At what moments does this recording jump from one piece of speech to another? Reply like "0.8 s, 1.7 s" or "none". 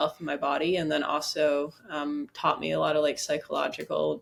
none